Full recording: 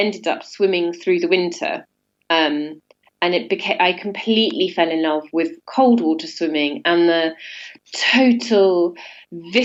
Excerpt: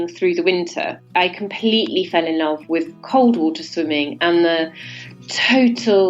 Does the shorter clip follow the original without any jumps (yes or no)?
no